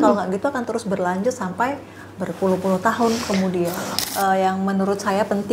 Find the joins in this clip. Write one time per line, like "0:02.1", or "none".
0:03.8